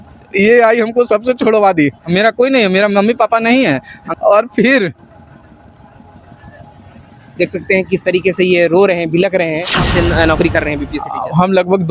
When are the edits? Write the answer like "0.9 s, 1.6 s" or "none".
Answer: 2.0 s, 4.0 s, 9.9 s